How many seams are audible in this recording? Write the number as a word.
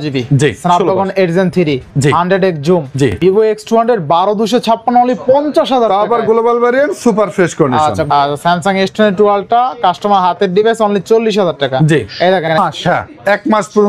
three